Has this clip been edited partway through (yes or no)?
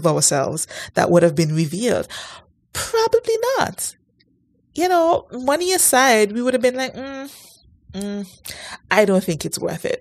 no